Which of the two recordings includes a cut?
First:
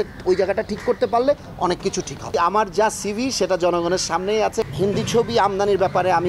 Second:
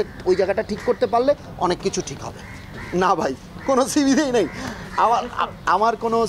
first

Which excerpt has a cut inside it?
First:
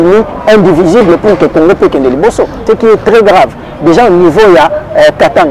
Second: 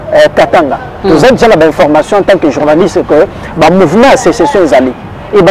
first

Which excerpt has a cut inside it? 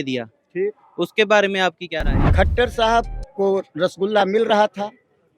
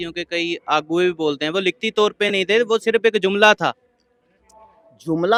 first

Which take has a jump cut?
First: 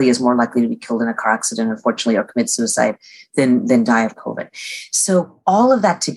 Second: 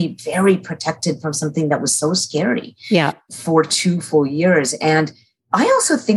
second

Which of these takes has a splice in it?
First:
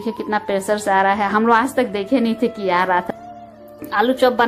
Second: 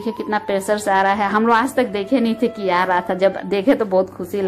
first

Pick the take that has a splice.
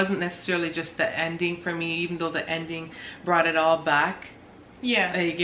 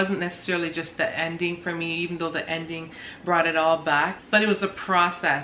second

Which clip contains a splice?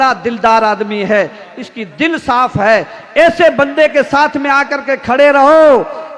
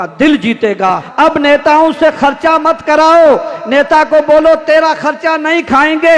second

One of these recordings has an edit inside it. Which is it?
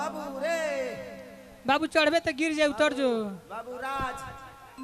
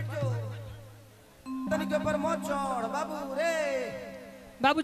second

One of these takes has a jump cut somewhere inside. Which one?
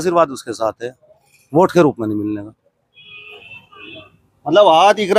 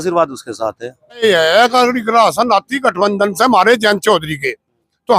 second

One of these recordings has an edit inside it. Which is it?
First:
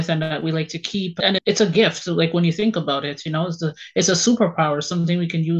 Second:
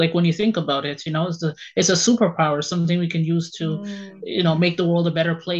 first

